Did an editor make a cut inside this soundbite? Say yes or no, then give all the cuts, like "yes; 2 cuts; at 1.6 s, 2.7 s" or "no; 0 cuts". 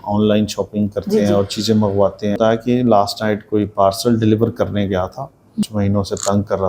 yes; 2 cuts; at 2.4 s, 5.7 s